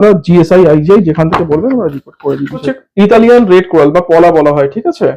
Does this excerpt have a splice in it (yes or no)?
yes